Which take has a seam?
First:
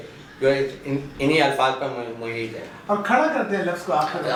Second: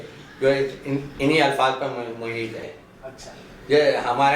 second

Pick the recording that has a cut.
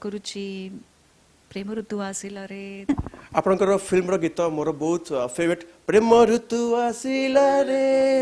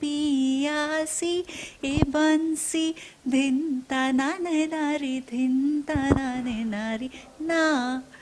first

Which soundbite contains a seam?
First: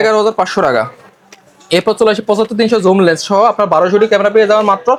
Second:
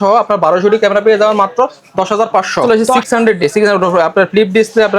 second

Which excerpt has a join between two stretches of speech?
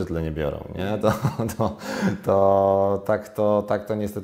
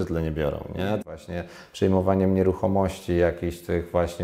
second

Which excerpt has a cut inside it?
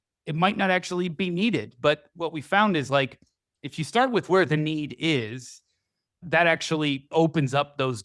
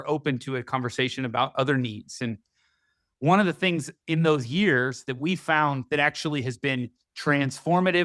first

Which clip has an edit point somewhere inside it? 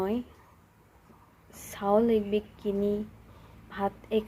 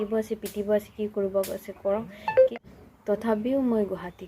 second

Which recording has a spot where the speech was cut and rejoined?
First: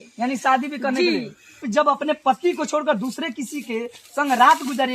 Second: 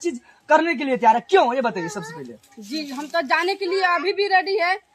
first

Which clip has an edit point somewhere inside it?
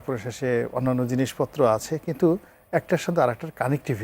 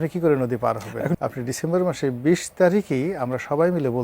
second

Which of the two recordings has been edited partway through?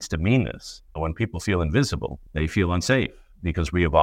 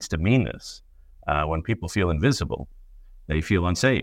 first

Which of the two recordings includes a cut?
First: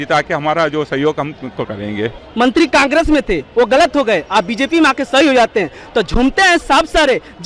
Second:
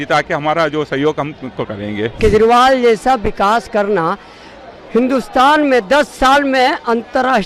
second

